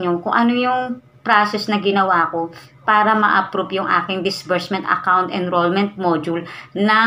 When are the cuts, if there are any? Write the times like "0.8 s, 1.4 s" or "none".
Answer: none